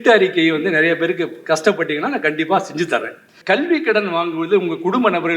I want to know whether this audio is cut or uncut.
cut